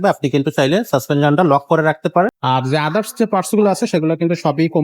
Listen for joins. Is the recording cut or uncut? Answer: cut